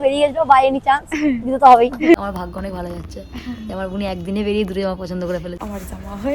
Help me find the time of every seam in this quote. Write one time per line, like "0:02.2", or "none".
0:02.1
0:05.6

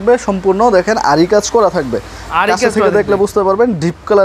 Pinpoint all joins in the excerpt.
none

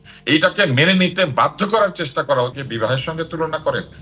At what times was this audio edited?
0:02.5

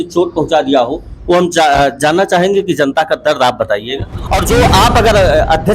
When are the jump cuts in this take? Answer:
0:04.4

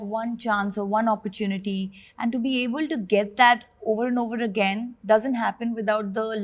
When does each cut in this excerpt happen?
none

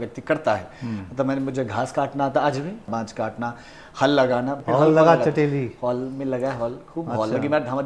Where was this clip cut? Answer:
0:02.9
0:04.6

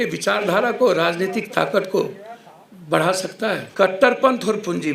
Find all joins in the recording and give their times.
0:03.7

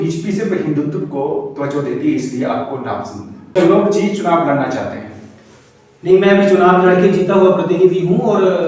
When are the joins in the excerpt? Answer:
0:03.5

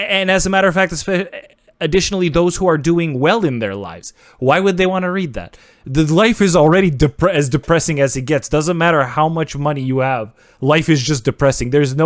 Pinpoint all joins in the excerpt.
none

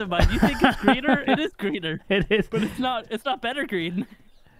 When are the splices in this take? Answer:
none

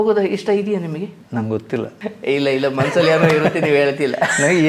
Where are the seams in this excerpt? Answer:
0:01.2
0:01.9

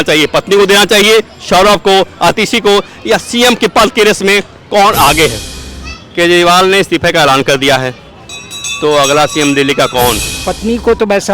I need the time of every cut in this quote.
0:05.5
0:10.4

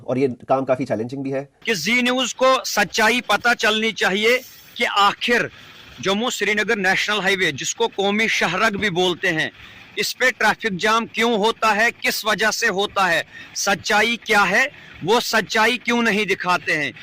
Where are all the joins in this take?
0:01.5

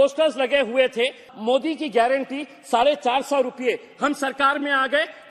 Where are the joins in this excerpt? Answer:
0:01.3

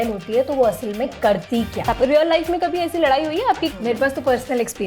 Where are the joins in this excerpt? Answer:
0:01.8
0:03.7

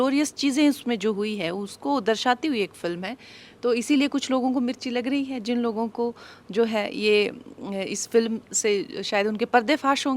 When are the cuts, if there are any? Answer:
none

